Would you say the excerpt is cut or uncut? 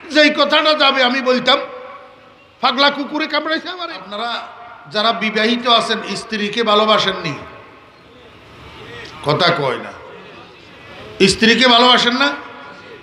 cut